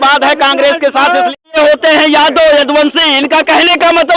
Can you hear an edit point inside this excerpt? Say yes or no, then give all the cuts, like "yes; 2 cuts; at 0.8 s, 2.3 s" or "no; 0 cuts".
yes; 1 cut; at 1.6 s